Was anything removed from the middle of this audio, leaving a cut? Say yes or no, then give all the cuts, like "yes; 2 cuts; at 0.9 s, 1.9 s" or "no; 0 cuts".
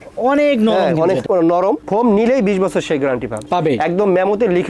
yes; 2 cuts; at 1.8 s, 3.4 s